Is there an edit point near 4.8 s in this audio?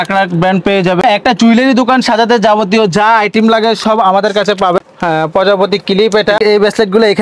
yes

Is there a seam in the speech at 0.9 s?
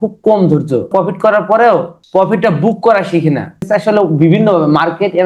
yes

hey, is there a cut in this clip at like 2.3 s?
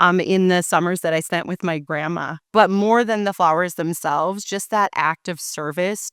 yes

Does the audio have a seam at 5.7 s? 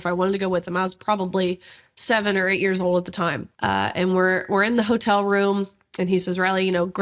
no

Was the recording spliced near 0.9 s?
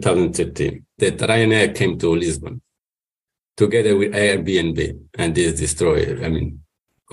yes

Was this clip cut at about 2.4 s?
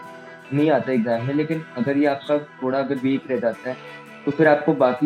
no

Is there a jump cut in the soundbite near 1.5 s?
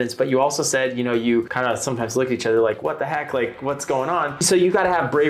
yes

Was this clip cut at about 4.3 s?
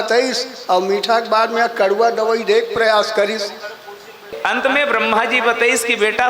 yes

